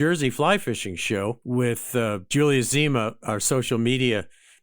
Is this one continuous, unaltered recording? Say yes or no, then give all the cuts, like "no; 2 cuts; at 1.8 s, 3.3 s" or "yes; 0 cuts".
no; 1 cut; at 1.7 s